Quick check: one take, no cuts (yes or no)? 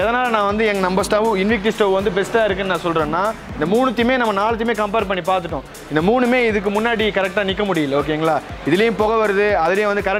yes